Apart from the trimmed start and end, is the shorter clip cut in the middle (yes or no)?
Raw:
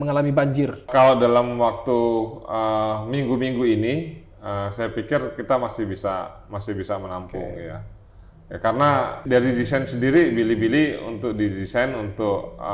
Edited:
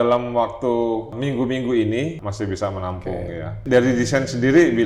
yes